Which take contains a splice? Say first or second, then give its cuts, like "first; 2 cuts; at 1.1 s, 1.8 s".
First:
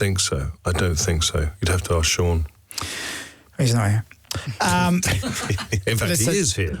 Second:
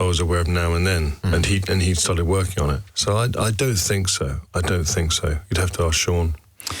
second; 2 cuts; at 1.1 s, 2.9 s